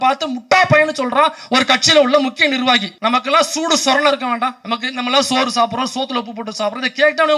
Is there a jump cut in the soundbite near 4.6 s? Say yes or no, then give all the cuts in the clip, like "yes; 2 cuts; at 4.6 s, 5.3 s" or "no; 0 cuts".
yes; 2 cuts; at 2.9 s, 4.6 s